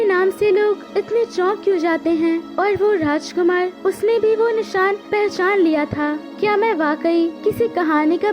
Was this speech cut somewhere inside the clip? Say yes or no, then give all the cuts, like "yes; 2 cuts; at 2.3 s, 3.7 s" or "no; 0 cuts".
yes; 6 cuts; at 0.8 s, 2.5 s, 3.7 s, 5.0 s, 6.3 s, 7.4 s